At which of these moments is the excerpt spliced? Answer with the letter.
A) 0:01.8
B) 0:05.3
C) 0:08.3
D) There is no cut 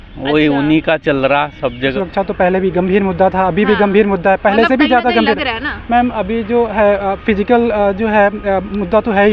A